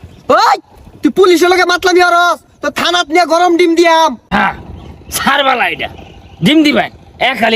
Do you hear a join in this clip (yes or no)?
no